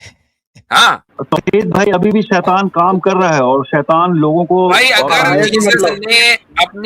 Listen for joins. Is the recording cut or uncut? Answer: cut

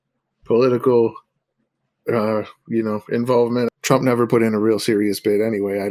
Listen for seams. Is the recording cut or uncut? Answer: cut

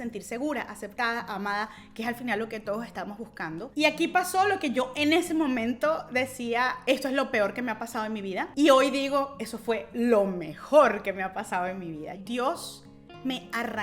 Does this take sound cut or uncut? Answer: cut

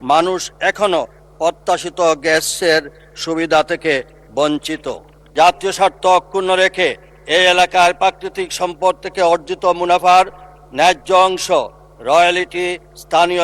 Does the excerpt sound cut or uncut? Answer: cut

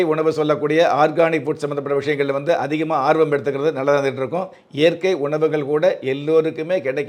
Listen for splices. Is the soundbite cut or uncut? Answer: uncut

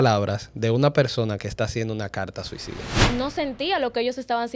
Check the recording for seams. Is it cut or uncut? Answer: cut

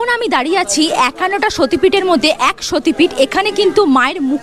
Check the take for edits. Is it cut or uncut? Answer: uncut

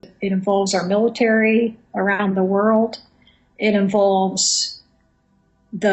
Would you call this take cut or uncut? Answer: uncut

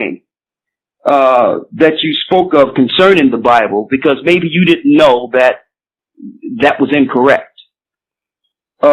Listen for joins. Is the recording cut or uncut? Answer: uncut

